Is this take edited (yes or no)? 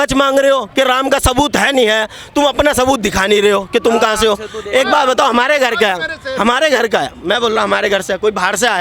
no